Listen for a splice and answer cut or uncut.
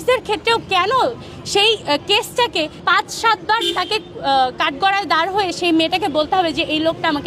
uncut